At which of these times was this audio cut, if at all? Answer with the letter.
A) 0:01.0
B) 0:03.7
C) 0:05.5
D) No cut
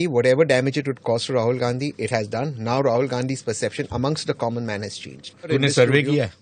C